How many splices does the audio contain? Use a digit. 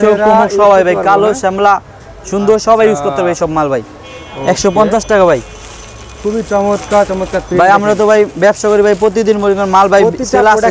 0